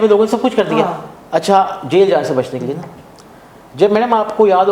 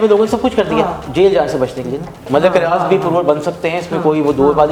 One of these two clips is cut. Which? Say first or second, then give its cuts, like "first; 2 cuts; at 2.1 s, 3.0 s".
second; 2 cuts; at 1.0 s, 2.3 s